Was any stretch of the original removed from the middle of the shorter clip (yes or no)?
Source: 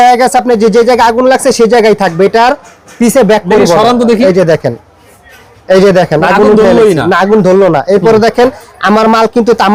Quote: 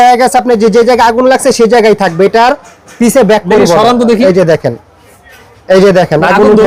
no